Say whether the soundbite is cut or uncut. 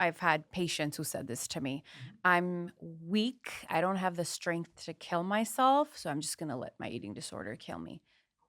uncut